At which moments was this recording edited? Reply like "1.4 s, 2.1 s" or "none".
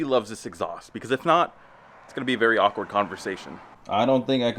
none